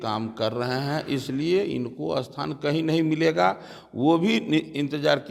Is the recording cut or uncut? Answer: uncut